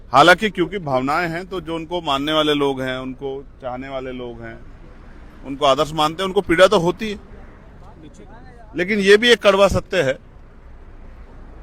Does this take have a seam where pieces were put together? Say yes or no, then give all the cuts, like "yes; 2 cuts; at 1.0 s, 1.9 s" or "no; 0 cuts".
no; 0 cuts